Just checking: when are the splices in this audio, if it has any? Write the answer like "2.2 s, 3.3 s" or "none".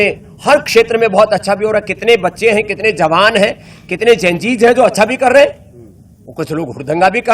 none